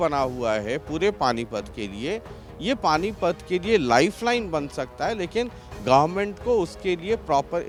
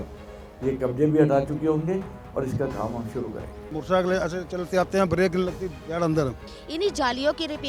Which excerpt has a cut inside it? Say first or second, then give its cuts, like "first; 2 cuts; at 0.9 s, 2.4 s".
second; 2 cuts; at 3.8 s, 6.5 s